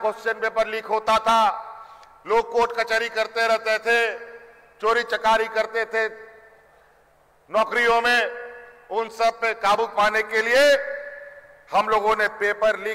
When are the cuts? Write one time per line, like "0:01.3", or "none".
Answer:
none